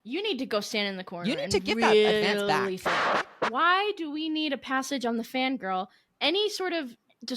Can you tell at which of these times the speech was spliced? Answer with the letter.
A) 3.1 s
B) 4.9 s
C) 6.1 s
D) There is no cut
A